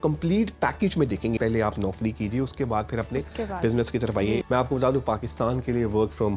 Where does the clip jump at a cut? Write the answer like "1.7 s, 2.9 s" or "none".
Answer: 1.4 s, 4.4 s